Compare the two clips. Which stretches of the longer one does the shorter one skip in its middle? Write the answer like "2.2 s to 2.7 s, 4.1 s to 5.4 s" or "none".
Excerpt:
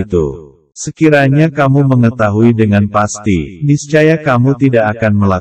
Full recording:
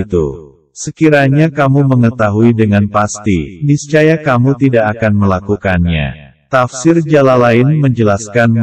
none